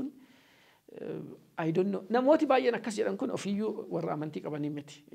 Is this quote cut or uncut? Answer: uncut